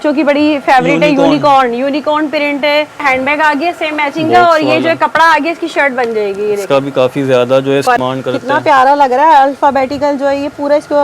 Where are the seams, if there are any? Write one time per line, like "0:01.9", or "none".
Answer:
0:03.0
0:08.0